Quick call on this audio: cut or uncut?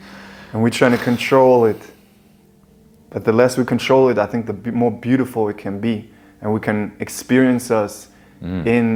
uncut